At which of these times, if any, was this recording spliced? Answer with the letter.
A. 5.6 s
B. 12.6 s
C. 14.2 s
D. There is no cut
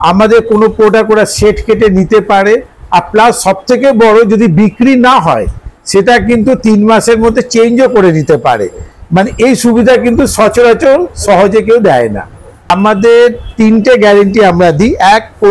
D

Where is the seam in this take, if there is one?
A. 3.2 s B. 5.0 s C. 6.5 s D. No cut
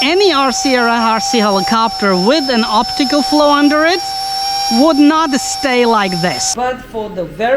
C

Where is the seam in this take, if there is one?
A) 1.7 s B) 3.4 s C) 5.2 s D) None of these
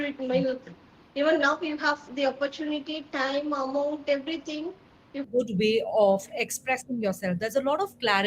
C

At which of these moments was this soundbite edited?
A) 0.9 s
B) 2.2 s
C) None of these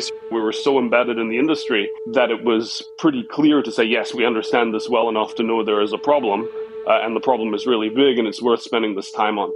C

